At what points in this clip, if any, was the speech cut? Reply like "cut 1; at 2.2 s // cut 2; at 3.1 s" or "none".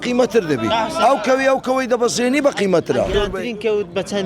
cut 1; at 3.1 s